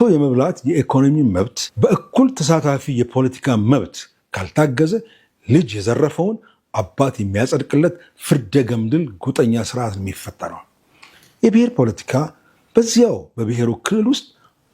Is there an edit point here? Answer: yes; 1 cut; at 1.6 s

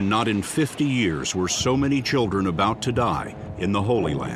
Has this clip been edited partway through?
no; 0 cuts

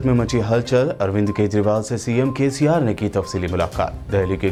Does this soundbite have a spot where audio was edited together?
no; 0 cuts

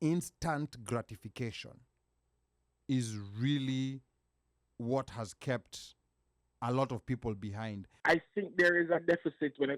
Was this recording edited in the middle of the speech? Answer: yes; 1 cut; at 8.0 s

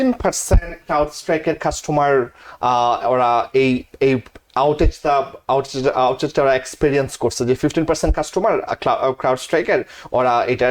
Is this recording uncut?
yes; 0 cuts

